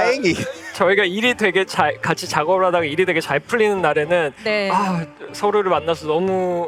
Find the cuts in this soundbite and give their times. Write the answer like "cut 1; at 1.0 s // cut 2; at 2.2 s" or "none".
none